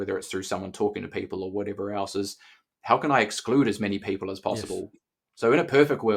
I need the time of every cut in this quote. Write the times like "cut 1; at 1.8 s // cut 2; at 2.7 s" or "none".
none